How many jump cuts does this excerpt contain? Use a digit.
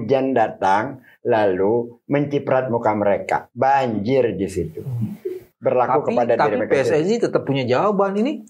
1